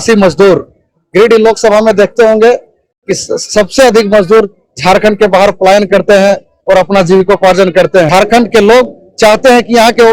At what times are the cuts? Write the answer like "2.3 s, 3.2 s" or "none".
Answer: 8.1 s